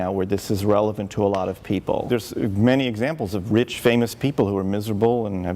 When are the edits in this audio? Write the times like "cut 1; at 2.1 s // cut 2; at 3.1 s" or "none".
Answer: cut 1; at 2.1 s